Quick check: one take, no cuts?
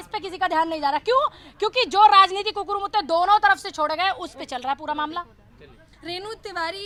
yes; 0 cuts

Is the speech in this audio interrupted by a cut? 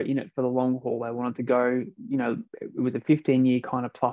yes; 1 cut; at 2.5 s

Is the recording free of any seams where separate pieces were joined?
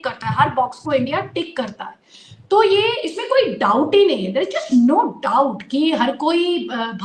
yes; 0 cuts

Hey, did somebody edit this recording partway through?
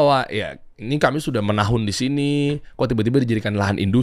no; 0 cuts

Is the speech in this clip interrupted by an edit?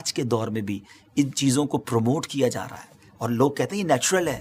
no; 0 cuts

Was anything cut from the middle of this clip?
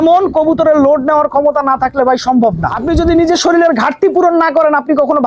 yes; 1 cut; at 2.7 s

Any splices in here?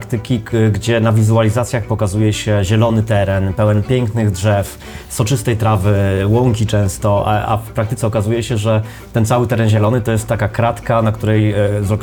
no; 0 cuts

